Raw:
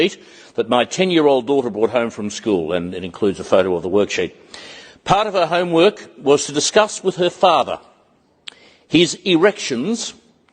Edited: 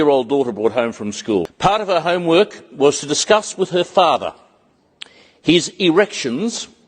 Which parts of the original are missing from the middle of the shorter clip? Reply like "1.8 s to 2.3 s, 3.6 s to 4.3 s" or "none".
2.7 s to 4.9 s